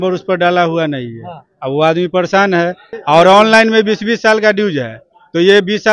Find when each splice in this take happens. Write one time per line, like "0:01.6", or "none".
0:02.9